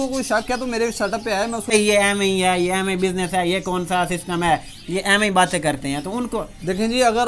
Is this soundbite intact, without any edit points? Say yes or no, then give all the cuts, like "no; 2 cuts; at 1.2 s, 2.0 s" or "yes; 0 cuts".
no; 1 cut; at 1.7 s